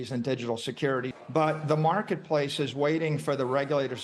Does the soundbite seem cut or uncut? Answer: cut